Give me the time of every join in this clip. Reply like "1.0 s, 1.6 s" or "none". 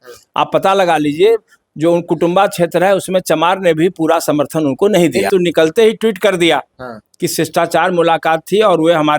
5.3 s

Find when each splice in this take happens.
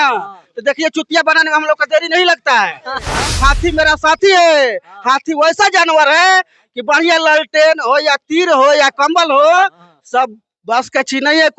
3.1 s

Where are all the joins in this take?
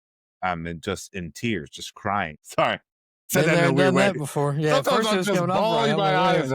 2.4 s

